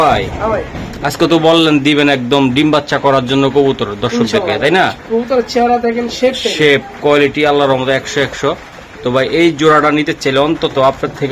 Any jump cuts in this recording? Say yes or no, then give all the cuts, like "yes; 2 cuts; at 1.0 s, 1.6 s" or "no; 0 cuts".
no; 0 cuts